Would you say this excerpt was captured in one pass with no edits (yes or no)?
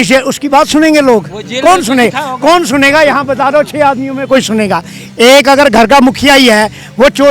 yes